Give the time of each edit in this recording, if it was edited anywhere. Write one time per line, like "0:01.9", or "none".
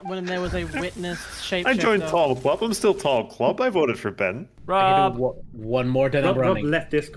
0:04.5